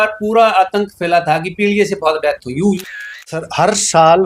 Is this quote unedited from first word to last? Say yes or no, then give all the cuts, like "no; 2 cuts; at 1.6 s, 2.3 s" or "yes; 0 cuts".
no; 1 cut; at 2.8 s